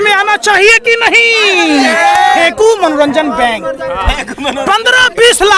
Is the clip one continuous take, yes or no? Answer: no